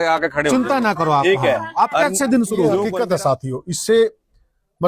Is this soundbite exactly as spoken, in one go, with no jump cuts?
no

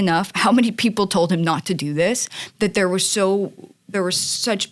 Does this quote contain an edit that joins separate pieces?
no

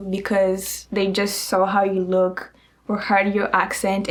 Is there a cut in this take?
no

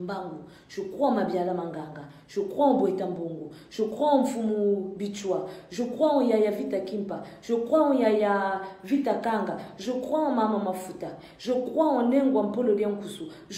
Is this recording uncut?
yes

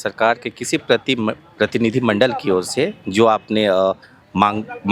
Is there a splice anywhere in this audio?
no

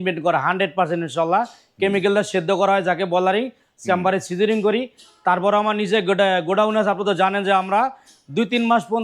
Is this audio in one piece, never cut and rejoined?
yes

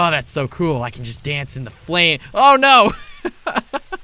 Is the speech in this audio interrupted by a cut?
no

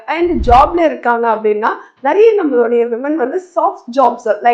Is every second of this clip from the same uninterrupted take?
yes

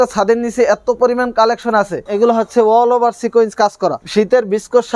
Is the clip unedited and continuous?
no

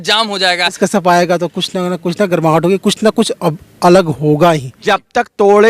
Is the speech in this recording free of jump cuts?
no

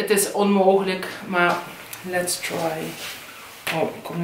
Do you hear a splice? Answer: no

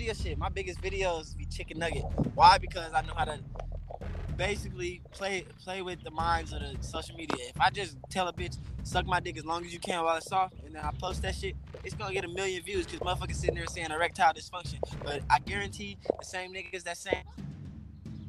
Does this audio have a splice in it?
yes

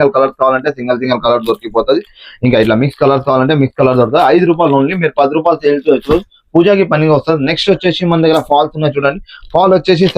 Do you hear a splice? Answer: no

